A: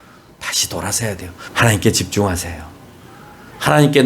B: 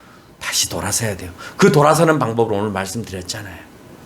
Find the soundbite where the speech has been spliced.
A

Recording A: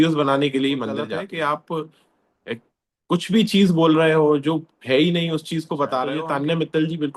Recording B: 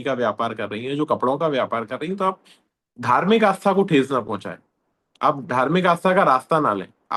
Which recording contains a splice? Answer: A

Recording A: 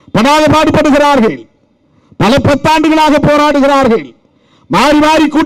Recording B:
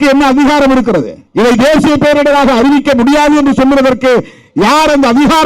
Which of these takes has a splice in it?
B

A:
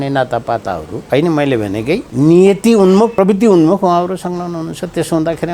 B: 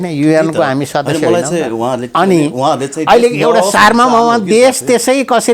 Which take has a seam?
A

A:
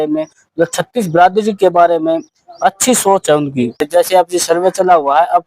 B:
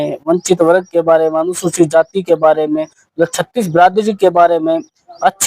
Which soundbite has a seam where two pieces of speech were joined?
A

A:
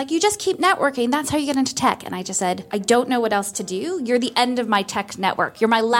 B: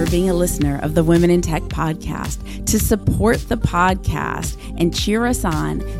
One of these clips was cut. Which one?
A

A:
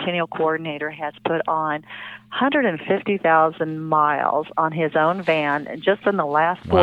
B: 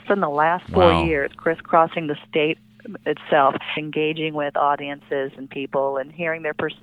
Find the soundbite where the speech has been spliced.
B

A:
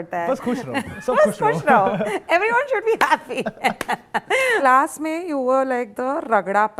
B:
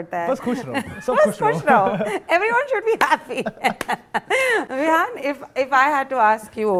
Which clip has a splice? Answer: A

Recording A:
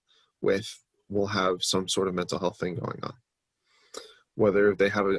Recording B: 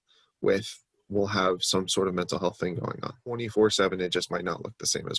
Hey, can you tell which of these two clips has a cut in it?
B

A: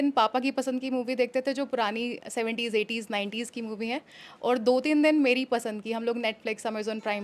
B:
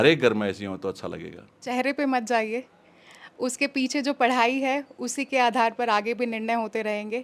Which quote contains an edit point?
B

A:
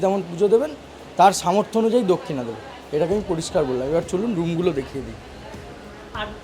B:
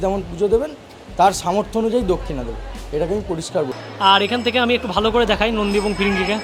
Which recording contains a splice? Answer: B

